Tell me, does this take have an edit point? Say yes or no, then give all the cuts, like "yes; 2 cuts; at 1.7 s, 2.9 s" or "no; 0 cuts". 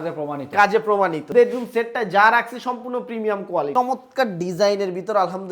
yes; 2 cuts; at 1.3 s, 3.7 s